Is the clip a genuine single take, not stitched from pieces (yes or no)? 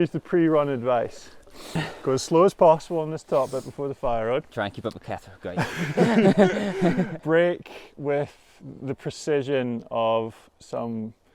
no